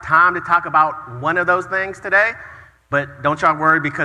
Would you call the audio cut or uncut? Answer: uncut